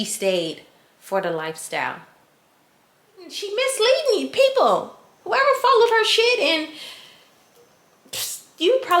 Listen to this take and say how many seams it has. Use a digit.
1